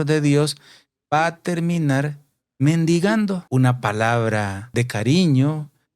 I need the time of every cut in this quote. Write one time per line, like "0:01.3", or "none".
0:03.4
0:04.7